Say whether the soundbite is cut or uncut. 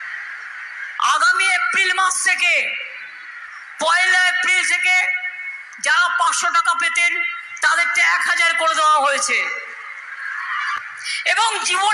cut